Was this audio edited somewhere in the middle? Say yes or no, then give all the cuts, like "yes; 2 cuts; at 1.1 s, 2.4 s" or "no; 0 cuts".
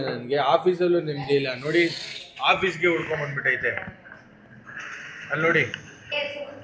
no; 0 cuts